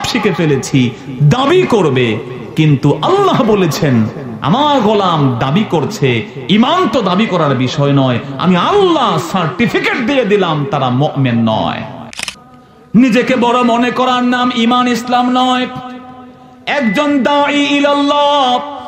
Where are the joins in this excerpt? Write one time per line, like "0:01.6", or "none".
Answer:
0:12.0